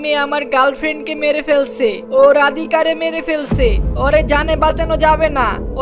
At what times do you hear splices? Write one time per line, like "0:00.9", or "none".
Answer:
0:02.0